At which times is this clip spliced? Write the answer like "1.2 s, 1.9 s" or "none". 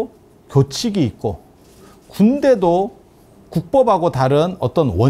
none